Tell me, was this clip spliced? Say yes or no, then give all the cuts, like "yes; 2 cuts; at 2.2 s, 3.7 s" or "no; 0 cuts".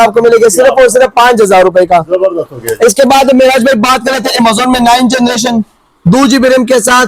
no; 0 cuts